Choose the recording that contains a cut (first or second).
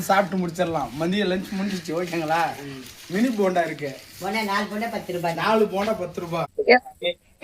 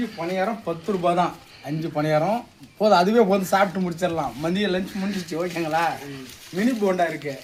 first